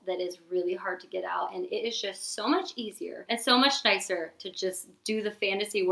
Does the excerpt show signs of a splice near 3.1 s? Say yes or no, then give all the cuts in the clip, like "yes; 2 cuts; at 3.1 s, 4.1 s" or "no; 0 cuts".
yes; 1 cut; at 3.1 s